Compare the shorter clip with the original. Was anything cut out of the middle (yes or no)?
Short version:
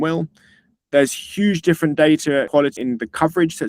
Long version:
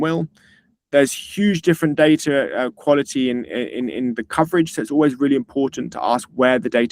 yes